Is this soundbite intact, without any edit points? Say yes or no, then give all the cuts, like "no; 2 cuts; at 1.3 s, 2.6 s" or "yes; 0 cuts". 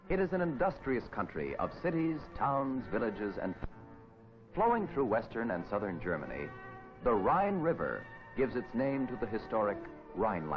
yes; 0 cuts